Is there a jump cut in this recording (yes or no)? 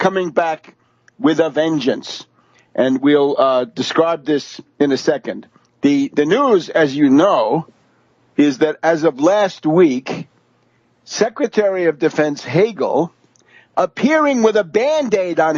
no